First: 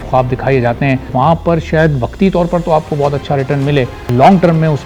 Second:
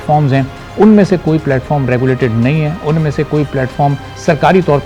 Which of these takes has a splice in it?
first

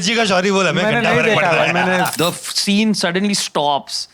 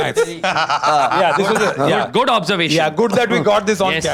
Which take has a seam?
first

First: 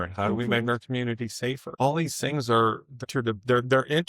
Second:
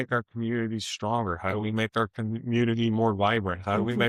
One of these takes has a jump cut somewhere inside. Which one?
first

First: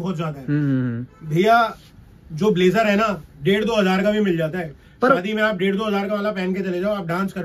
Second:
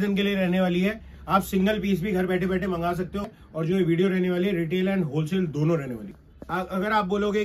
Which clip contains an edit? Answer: second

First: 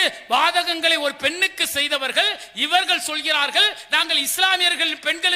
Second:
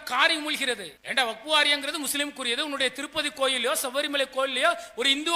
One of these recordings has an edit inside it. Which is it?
second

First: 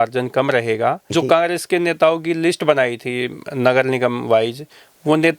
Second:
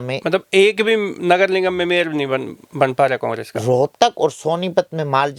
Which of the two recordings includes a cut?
first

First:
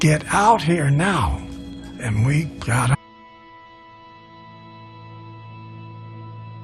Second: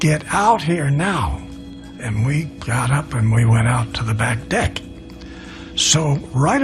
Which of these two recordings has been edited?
second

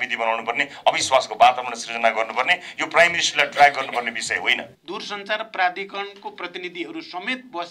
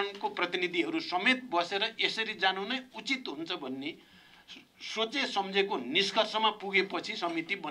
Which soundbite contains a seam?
first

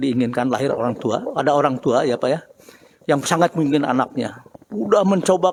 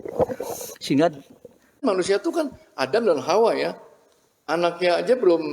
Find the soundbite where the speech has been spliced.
second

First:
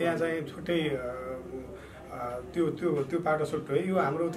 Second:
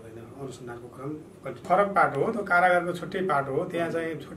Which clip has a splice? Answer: second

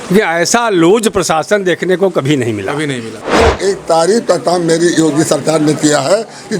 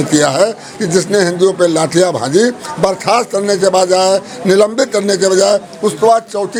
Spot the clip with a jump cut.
first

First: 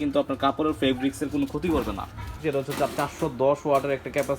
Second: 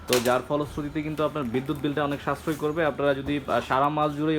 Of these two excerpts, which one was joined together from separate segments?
first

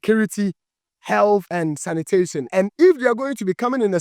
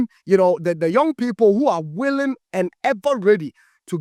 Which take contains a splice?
first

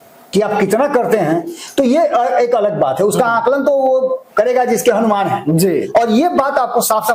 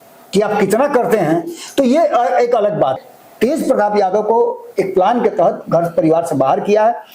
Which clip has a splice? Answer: second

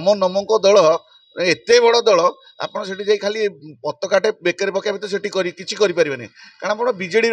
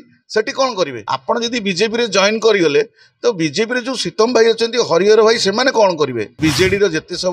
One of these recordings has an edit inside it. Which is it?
second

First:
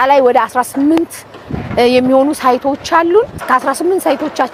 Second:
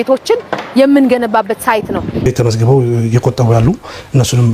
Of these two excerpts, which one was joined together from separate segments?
second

